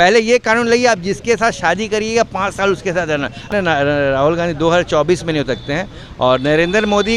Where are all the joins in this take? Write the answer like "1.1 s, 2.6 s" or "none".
3.4 s